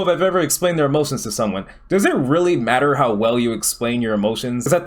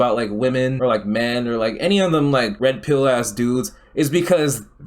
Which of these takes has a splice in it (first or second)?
second